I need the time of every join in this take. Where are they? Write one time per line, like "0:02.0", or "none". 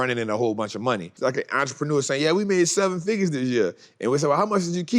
0:01.1